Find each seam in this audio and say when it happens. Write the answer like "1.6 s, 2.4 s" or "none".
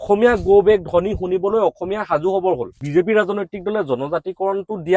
2.8 s

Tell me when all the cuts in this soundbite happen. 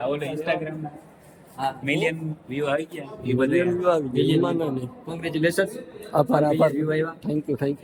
none

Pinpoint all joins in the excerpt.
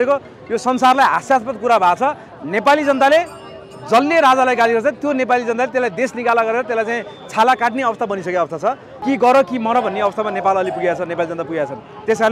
2.2 s, 8.9 s

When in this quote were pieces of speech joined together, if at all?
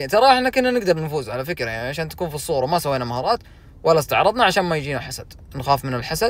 none

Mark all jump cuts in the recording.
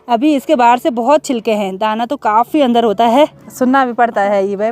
3.4 s

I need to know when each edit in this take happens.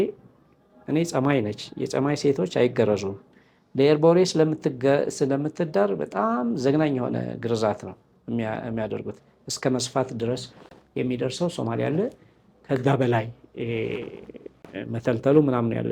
none

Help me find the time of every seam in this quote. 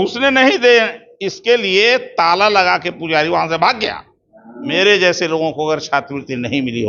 4.7 s

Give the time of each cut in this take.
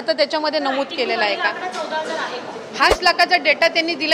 3.0 s

